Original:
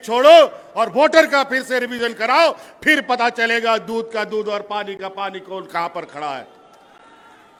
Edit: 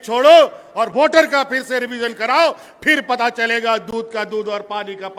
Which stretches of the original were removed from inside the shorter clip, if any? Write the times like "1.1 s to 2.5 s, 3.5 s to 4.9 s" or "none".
none